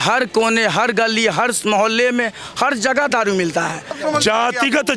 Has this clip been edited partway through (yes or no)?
yes